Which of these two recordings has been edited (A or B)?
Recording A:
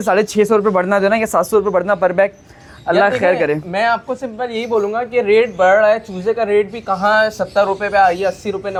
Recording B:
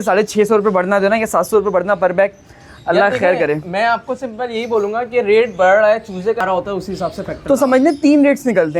B